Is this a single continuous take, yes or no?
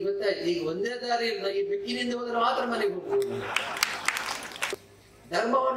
no